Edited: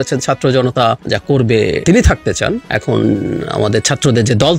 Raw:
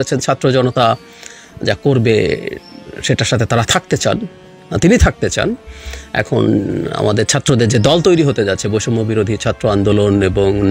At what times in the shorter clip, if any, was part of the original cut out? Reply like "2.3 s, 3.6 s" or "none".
1.0 s, 1.8 s, 2.6 s